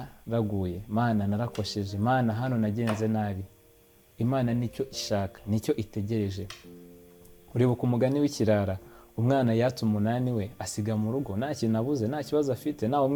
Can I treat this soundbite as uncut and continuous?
yes; 0 cuts

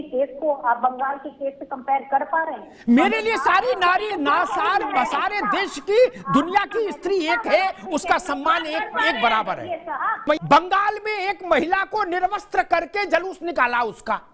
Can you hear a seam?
yes; 1 cut; at 10.3 s

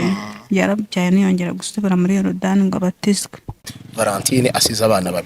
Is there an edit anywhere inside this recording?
yes; 1 cut; at 3.8 s

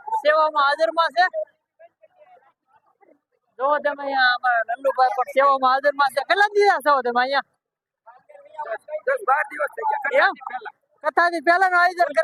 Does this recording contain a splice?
no; 0 cuts

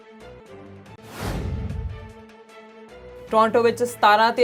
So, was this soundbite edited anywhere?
yes; 2 cuts; at 1.0 s, 3.2 s

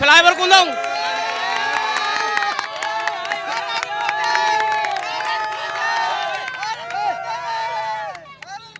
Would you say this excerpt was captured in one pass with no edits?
yes; 0 cuts

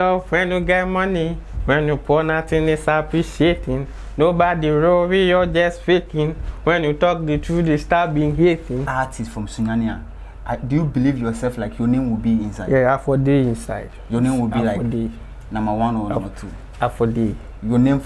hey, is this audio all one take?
no; 1 cut; at 8.9 s

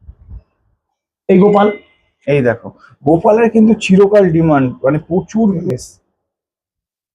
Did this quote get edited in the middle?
yes; 1 cut; at 5.6 s

